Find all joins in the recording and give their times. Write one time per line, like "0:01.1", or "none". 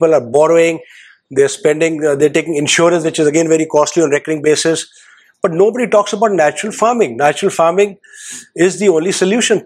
none